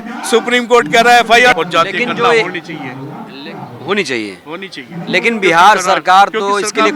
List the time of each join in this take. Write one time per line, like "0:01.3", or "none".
0:01.5